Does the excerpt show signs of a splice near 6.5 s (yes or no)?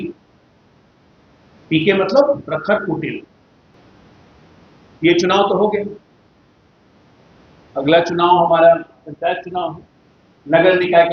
no